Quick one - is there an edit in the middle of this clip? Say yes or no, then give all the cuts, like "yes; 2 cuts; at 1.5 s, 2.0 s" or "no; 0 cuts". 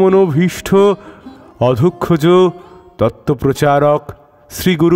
no; 0 cuts